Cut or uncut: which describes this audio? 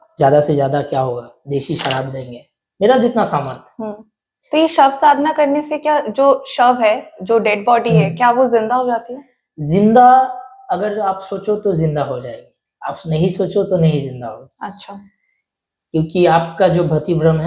uncut